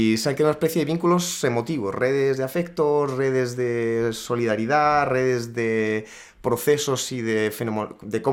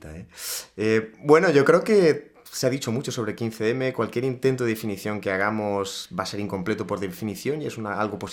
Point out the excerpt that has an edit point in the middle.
second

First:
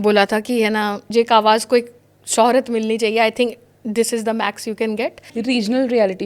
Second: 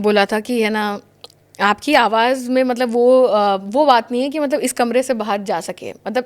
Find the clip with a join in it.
first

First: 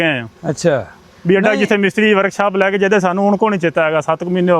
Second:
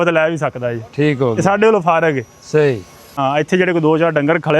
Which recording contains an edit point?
second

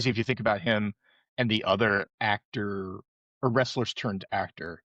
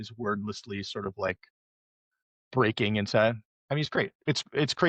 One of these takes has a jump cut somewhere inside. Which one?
second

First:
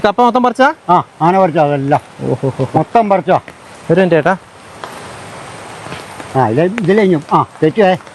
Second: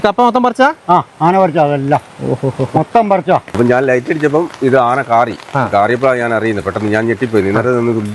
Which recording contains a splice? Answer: second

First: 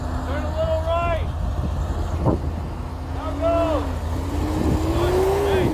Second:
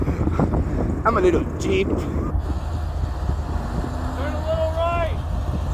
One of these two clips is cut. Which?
second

